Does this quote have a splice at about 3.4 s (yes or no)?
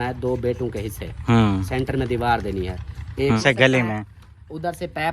yes